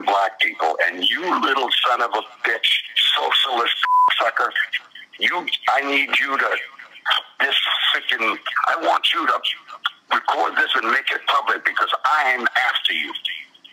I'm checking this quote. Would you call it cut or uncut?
uncut